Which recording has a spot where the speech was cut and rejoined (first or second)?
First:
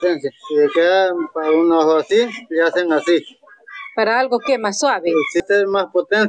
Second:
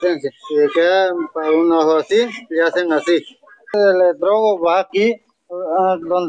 second